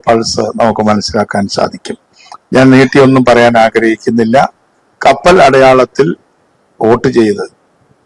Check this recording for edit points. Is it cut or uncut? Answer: uncut